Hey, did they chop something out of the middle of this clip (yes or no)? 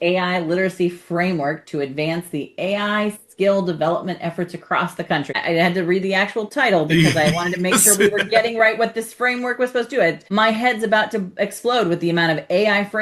yes